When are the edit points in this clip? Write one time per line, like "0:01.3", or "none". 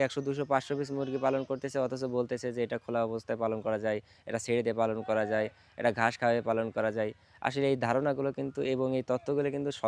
none